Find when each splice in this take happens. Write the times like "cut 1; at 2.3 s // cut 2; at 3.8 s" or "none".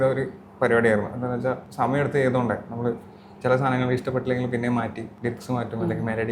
cut 1; at 1.7 s // cut 2; at 5.1 s